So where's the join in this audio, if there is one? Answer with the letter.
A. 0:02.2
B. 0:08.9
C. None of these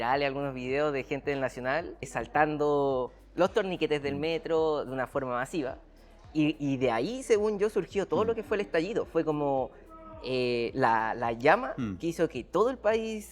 A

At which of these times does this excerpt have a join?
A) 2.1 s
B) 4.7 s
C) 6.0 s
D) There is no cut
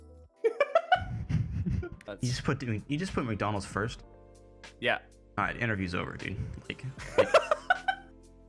A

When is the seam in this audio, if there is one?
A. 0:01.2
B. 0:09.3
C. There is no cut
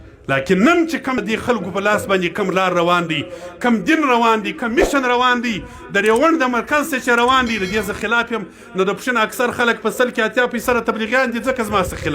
A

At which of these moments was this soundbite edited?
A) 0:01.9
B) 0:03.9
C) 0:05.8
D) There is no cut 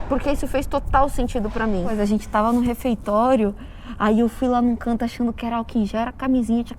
A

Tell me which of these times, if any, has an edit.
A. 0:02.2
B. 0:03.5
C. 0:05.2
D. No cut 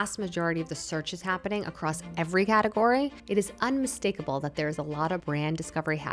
C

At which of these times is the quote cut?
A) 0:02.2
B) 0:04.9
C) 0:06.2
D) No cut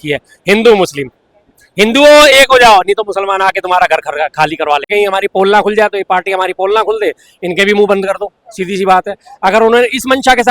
B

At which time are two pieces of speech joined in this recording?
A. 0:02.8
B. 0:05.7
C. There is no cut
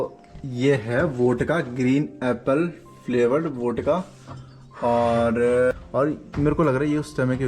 B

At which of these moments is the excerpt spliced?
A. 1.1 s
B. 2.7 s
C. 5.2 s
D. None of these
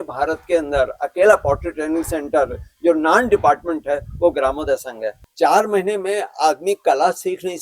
C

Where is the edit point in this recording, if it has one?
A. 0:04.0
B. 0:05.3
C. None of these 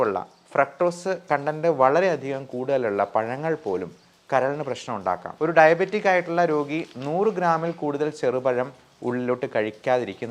B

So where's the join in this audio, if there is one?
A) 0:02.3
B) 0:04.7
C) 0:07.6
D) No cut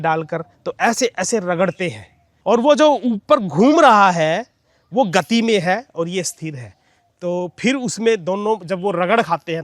A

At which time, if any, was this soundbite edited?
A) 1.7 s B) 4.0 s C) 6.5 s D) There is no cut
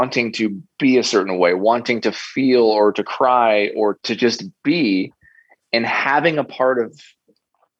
B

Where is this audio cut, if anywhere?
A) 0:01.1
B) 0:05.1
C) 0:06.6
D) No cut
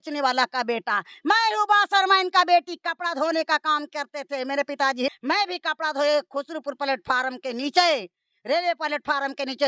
B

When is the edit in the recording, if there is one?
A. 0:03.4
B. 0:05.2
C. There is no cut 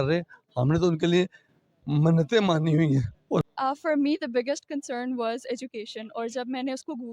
A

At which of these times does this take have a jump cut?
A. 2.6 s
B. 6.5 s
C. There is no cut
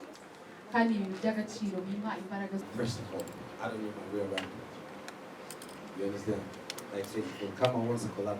A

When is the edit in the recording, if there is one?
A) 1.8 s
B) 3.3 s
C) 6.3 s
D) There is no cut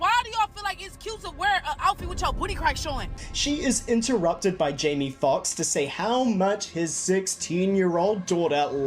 B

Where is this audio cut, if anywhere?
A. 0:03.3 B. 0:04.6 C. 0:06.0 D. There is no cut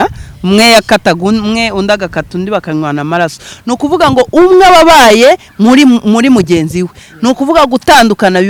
D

